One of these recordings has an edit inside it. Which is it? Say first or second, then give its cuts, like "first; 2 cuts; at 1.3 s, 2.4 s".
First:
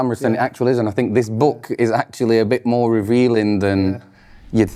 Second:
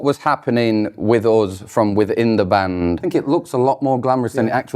second; 1 cut; at 3.0 s